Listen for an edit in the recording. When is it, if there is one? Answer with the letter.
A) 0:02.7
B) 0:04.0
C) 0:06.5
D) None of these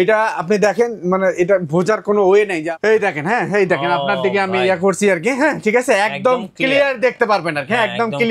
A